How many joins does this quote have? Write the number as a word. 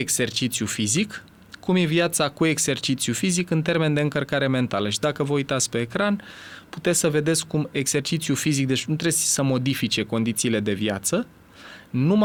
zero